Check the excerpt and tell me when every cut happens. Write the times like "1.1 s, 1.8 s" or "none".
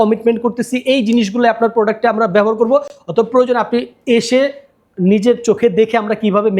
none

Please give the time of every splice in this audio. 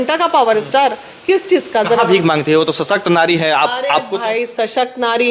none

